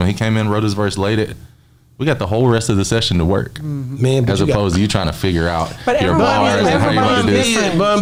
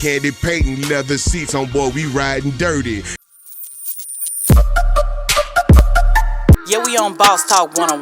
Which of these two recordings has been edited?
second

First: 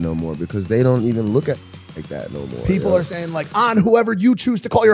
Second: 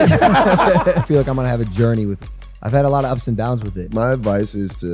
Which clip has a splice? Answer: second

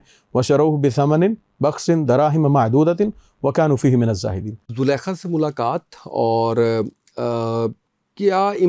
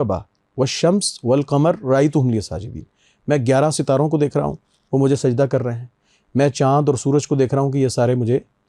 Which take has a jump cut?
first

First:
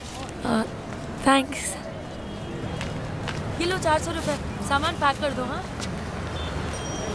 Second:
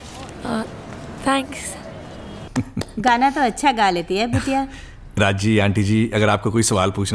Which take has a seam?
second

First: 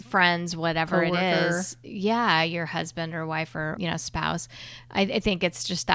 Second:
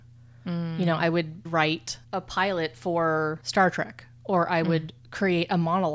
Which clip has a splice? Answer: second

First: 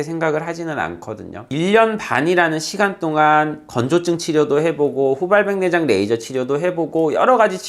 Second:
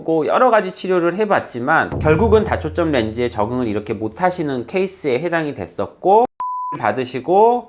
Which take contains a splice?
first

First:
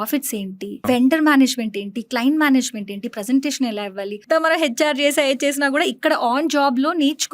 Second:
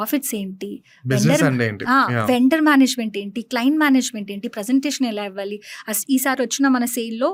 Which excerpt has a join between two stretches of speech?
first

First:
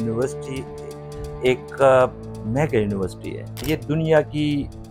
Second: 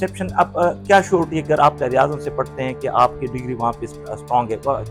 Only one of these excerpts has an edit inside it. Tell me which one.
first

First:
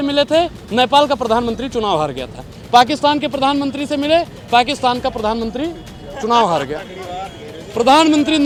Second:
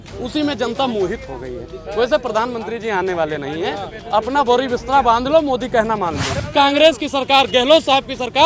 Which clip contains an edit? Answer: second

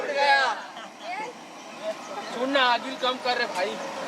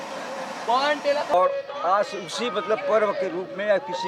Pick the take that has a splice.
second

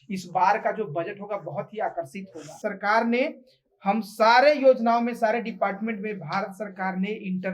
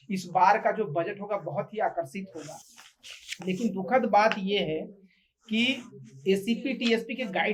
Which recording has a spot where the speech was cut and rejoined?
first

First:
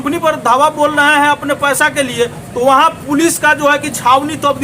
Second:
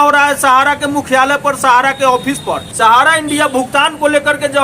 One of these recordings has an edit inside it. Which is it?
second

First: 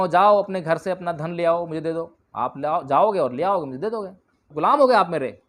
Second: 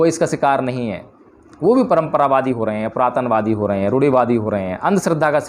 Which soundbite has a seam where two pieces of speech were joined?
first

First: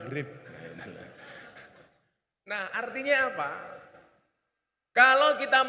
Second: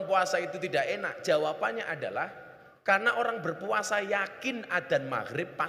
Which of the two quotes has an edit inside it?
first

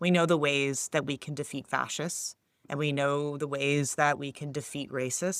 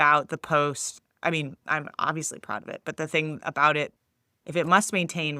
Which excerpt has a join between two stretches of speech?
second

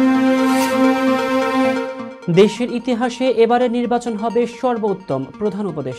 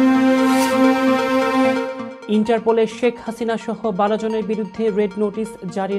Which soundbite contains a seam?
second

